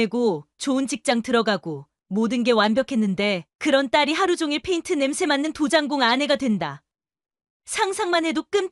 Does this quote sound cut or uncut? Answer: uncut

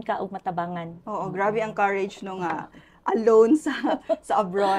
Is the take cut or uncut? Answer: uncut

